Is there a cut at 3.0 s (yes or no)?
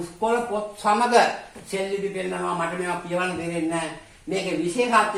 no